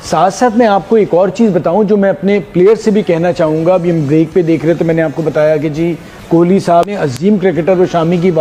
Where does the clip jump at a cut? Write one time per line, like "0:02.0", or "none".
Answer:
none

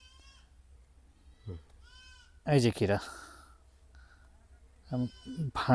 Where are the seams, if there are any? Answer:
none

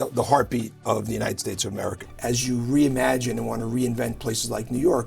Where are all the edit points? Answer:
0:02.1

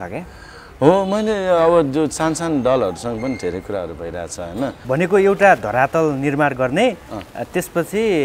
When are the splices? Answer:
0:04.8

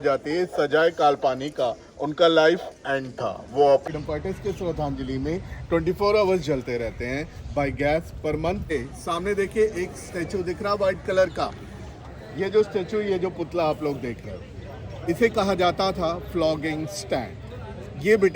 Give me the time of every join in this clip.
0:03.8
0:08.6

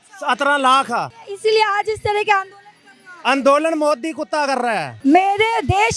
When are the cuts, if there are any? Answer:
0:01.2
0:04.9

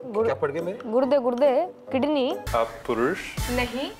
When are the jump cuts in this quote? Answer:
0:02.4

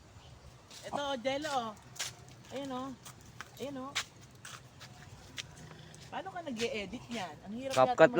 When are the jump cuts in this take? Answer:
0:05.8

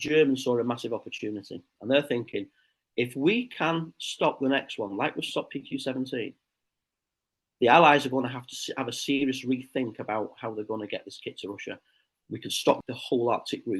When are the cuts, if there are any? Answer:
0:12.8

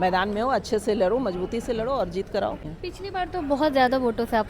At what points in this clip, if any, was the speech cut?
0:02.7

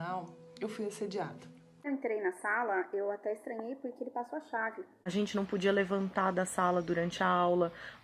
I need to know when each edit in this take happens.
0:01.9
0:04.9

